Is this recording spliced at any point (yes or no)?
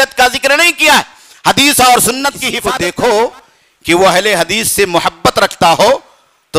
yes